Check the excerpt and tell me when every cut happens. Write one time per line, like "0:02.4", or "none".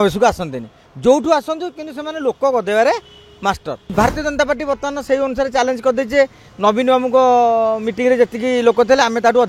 0:03.9